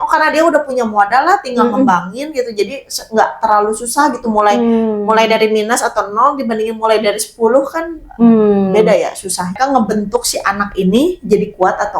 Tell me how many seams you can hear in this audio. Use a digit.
1